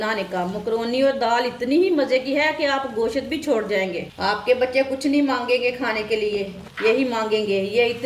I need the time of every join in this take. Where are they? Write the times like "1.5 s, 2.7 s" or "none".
4.1 s, 6.6 s